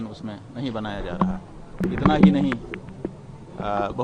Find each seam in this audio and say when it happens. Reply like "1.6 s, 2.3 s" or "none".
1.8 s